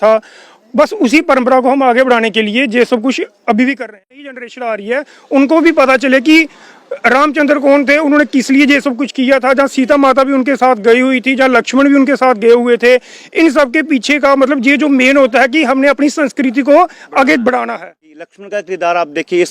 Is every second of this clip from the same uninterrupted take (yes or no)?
no